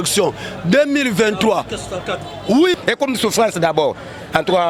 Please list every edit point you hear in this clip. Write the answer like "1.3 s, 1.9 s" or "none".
2.8 s

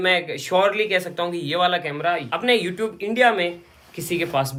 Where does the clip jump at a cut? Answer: none

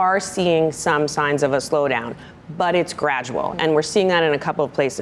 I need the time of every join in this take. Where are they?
none

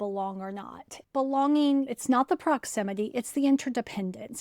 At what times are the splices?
1.0 s, 1.9 s

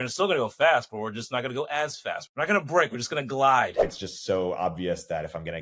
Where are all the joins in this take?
2.3 s, 3.9 s

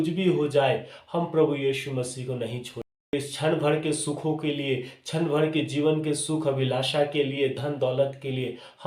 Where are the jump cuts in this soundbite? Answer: 3.1 s

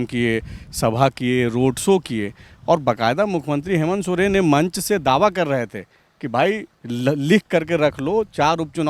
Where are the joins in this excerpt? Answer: none

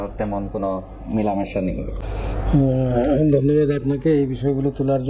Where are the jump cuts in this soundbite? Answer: none

